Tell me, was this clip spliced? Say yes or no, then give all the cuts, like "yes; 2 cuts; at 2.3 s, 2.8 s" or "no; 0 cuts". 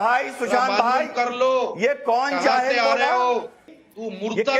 yes; 1 cut; at 3.7 s